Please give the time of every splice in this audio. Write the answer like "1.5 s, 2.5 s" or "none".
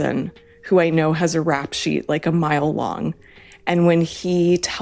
none